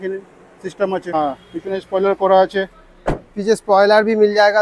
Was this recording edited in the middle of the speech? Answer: yes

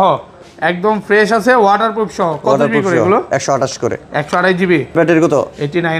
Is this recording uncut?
no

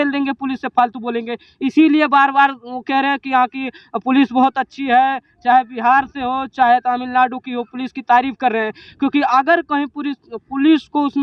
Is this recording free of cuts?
yes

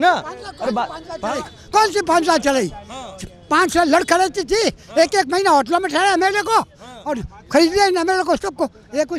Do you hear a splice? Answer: no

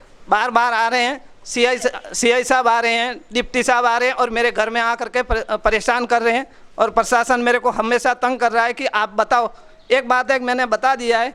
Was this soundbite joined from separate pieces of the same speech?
no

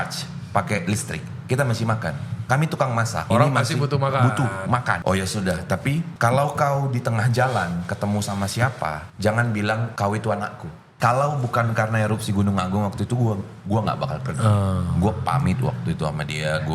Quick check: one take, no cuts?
no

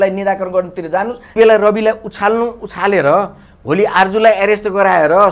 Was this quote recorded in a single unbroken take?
no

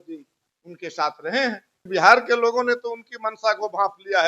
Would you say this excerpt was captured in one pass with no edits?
no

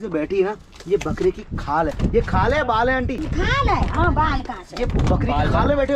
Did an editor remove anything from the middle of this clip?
no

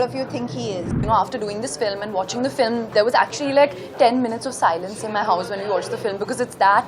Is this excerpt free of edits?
no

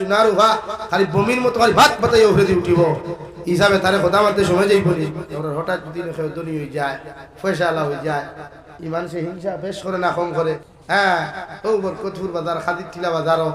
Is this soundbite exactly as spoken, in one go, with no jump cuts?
no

